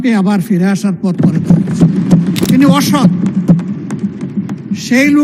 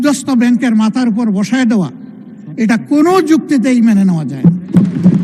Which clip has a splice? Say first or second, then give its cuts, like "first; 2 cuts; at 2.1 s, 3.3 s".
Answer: first; 1 cut; at 2.4 s